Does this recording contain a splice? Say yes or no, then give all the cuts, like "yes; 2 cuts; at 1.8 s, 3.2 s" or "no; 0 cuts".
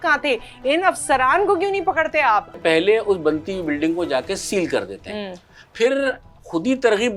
yes; 1 cut; at 2.6 s